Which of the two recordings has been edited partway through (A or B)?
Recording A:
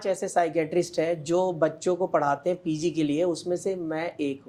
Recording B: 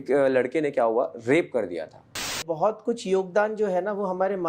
B